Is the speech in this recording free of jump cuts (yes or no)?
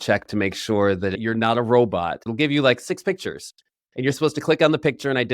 no